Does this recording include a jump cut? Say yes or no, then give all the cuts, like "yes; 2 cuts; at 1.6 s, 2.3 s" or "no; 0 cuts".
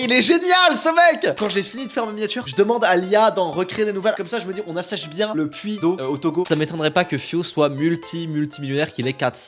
yes; 3 cuts; at 1.3 s, 4.1 s, 6.5 s